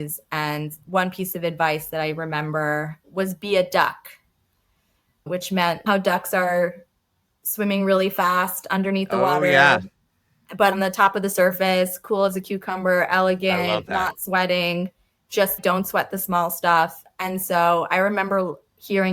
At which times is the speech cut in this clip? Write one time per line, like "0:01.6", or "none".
0:03.0
0:05.8
0:10.7
0:15.6